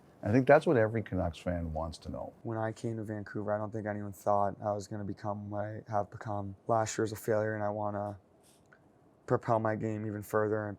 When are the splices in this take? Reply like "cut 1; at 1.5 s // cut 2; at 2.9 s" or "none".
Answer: cut 1; at 2.3 s // cut 2; at 6.5 s